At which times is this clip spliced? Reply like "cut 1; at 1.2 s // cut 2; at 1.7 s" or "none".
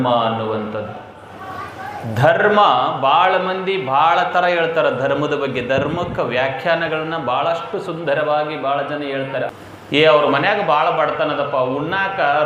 cut 1; at 9.5 s